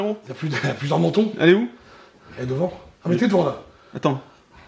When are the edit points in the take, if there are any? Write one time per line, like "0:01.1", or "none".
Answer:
none